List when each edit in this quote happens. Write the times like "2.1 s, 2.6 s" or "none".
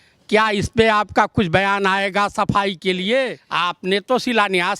3.4 s